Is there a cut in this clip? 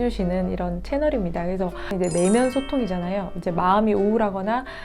yes; 1 cut; at 1.9 s

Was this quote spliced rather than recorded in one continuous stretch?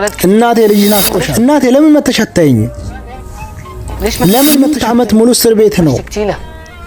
yes; 2 cuts; at 1.2 s, 4.8 s

